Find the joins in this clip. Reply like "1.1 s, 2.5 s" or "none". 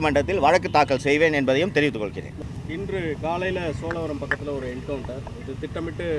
2.4 s